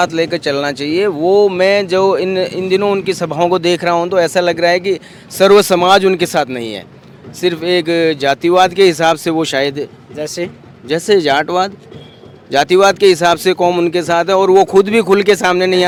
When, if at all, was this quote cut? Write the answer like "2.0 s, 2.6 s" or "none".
none